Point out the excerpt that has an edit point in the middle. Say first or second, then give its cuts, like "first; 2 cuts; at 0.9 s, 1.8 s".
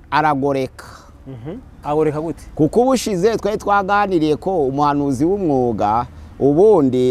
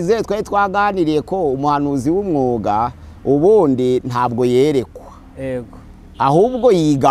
first; 1 cut; at 1.8 s